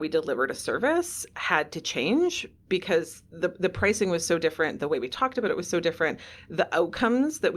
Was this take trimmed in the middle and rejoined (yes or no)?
no